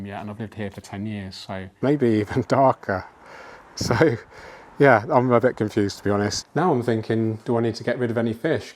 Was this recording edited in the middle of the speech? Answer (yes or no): yes